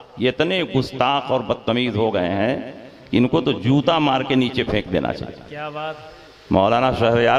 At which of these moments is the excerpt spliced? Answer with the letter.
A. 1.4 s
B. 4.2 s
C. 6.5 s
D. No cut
D